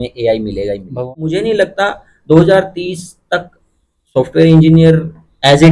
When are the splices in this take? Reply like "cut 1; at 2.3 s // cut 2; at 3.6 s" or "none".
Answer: cut 1; at 1.0 s